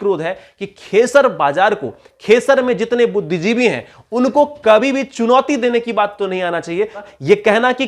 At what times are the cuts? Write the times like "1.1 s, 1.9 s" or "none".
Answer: 7.0 s